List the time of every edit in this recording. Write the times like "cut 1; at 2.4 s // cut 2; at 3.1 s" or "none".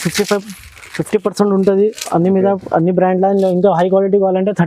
none